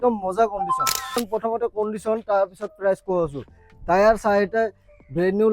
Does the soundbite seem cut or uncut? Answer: cut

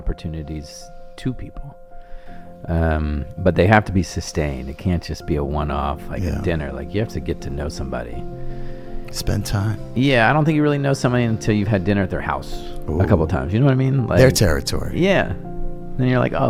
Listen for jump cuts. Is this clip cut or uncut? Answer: uncut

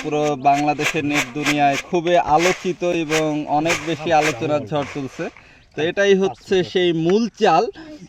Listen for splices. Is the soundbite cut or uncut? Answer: uncut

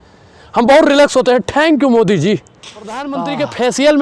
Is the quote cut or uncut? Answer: cut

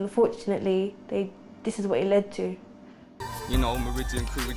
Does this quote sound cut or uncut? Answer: cut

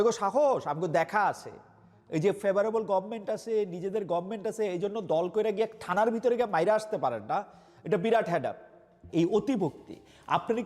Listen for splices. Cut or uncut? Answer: cut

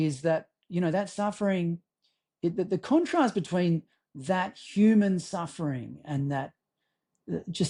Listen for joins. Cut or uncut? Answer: uncut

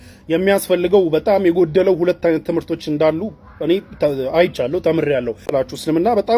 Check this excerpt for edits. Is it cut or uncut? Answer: cut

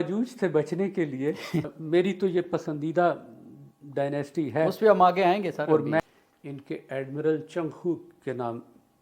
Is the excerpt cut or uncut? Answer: cut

